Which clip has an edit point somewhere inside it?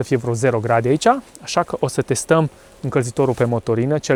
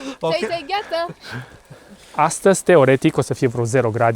second; 1 cut; at 2.1 s

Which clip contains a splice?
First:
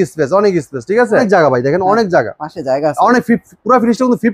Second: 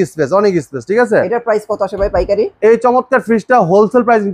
first; 1 cut; at 1.2 s

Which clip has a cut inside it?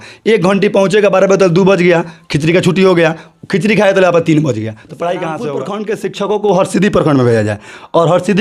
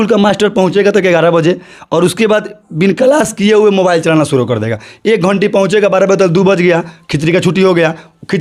first; 1 cut; at 5.4 s

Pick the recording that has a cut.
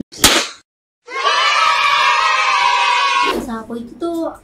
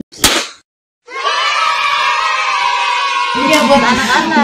first; 1 cut; at 3.3 s

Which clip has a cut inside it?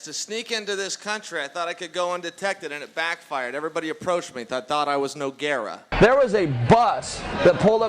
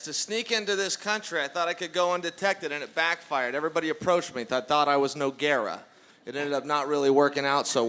first; 1 cut; at 5.8 s

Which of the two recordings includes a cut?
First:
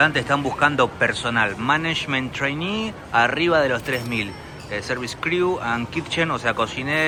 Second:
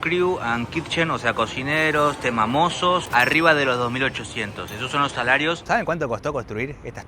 second; 2 cuts; at 3.1 s, 5.6 s

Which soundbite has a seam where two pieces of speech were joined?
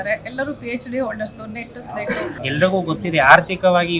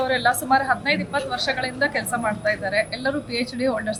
first; 1 cut; at 2.4 s

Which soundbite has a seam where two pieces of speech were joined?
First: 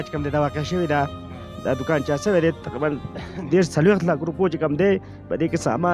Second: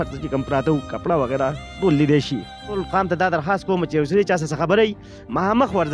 second; 1 cut; at 2.8 s

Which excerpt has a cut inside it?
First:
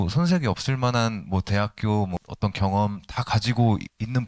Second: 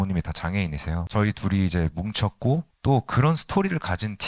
second; 1 cut; at 1.0 s

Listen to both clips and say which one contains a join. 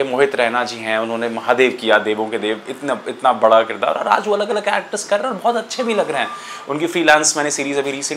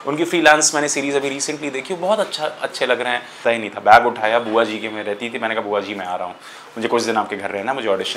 second; 1 cut; at 3.4 s

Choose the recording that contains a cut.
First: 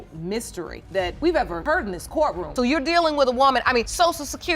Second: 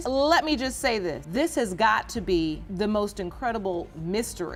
first; 1 cut; at 2.4 s

